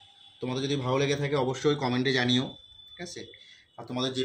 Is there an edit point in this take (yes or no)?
no